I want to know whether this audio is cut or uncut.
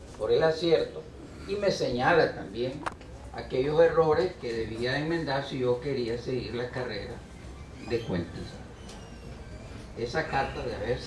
uncut